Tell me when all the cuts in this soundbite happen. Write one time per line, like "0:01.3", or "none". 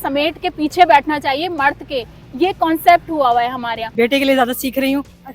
0:03.9